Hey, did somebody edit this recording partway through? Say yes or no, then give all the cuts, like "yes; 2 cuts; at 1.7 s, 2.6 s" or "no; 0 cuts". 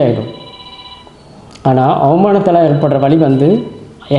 no; 0 cuts